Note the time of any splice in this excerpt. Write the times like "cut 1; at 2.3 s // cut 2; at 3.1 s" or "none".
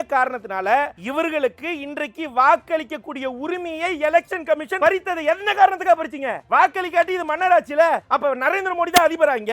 cut 1; at 1.0 s // cut 2; at 4.7 s // cut 3; at 6.3 s // cut 4; at 8.1 s